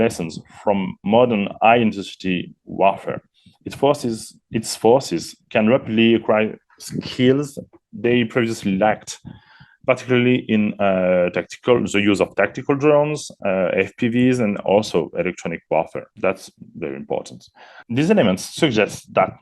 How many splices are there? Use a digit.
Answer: 1